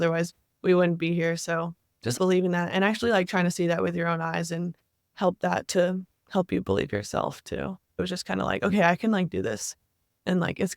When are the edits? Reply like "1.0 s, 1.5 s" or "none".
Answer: 2.1 s, 8.0 s